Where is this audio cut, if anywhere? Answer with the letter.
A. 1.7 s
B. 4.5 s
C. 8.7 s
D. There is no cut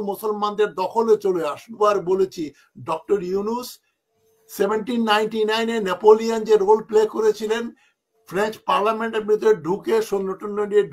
A